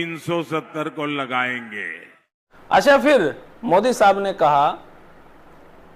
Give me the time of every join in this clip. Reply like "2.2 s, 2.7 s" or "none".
2.9 s